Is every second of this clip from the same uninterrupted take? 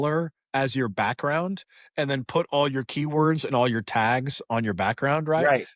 yes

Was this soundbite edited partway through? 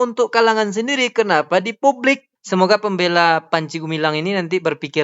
yes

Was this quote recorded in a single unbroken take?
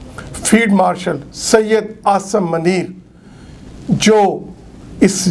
yes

